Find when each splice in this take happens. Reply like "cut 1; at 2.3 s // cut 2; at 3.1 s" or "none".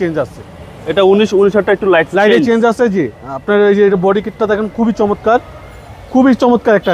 none